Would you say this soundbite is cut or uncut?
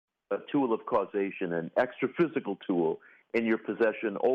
uncut